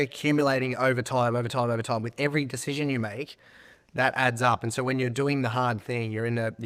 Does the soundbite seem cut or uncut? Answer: uncut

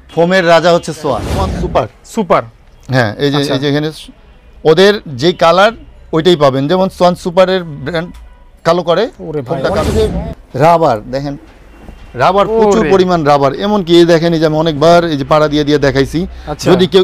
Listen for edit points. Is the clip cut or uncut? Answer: cut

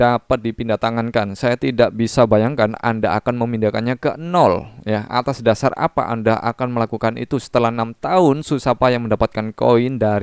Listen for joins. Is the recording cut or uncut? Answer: uncut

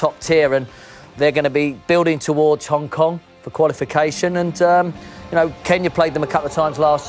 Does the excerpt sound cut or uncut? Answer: uncut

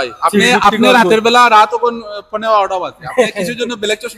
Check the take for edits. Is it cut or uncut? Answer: uncut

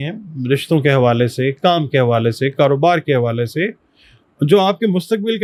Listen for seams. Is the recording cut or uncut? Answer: uncut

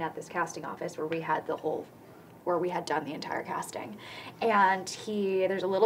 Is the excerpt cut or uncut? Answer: uncut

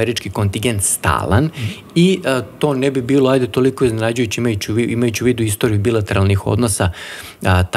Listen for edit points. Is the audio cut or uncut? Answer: uncut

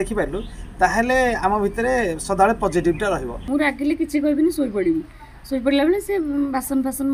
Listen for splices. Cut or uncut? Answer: cut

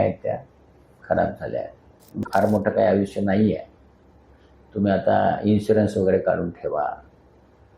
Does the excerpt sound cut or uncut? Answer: cut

